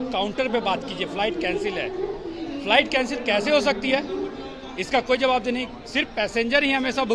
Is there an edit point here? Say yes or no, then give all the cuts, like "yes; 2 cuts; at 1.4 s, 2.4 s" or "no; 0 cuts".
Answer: no; 0 cuts